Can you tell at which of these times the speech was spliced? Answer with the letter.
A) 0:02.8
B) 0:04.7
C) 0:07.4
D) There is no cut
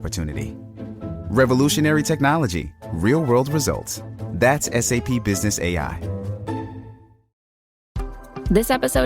C